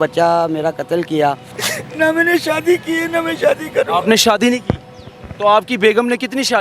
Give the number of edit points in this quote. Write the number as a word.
one